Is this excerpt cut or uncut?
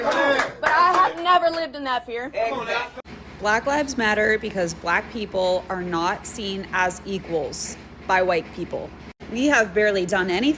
cut